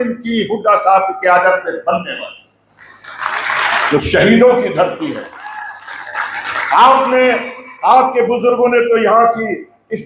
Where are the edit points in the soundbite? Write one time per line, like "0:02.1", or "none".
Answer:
0:03.9